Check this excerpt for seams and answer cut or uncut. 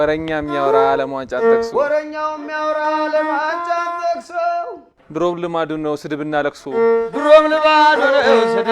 uncut